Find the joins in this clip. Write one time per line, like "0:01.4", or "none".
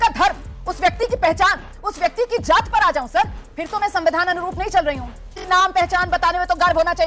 0:05.4